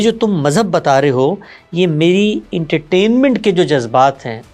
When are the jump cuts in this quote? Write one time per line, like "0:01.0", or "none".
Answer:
none